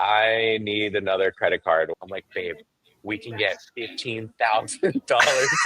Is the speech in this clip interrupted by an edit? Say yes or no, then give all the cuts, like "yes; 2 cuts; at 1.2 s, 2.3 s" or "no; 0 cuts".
yes; 1 cut; at 1.9 s